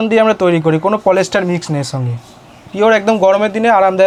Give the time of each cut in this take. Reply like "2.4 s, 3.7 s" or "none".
none